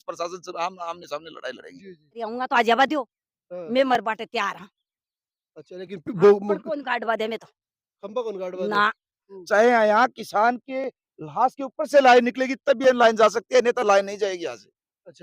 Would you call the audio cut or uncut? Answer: cut